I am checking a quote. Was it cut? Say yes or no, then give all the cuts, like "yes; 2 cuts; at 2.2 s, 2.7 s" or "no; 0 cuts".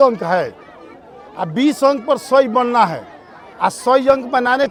no; 0 cuts